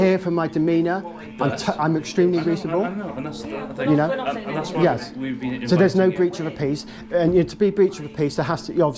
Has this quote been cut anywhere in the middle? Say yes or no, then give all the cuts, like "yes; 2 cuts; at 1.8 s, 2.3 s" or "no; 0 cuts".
no; 0 cuts